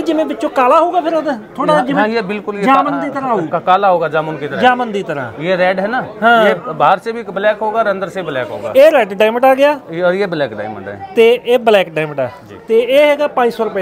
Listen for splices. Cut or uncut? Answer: uncut